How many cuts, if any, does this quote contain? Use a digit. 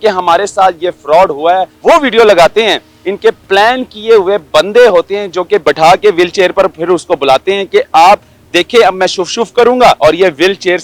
4